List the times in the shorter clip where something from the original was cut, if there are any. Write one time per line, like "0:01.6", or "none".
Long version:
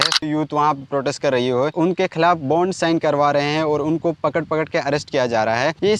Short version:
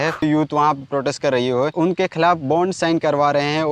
none